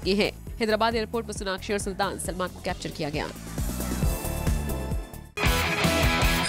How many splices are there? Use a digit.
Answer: 1